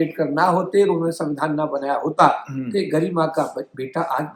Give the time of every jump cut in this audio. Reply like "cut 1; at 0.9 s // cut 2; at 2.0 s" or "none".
none